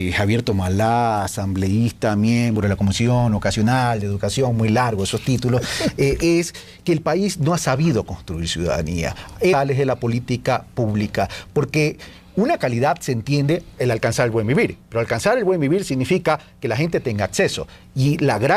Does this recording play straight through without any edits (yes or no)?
yes